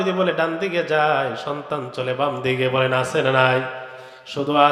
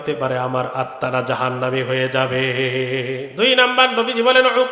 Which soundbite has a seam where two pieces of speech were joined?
second; 1 cut; at 3.3 s

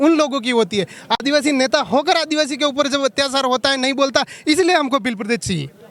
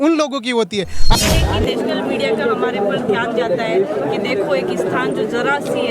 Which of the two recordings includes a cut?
second; 1 cut; at 1.2 s

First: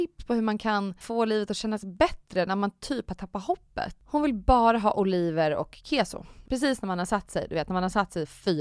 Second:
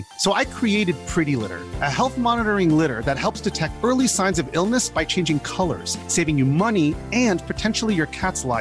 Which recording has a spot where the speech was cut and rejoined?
first; 3 cuts; at 1.0 s, 4.0 s, 6.4 s

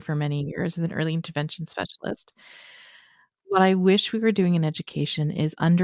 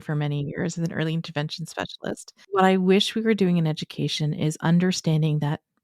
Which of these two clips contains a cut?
second; 1 cut; at 2.3 s

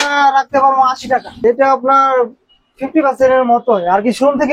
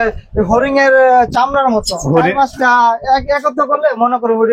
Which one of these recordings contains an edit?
first; 1 cut; at 1.3 s

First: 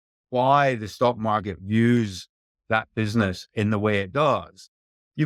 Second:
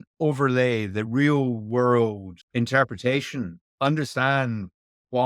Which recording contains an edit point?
second; 2 cuts; at 2.3 s, 3.6 s

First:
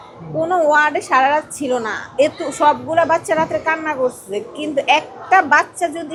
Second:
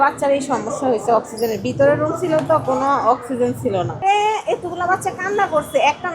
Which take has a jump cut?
second; 1 cut; at 3.9 s

